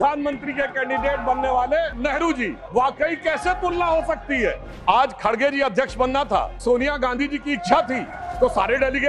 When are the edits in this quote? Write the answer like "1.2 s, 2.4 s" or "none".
2.4 s, 4.7 s, 6.6 s